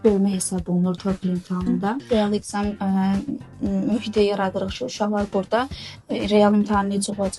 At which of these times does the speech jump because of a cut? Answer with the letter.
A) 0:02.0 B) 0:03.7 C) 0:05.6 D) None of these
A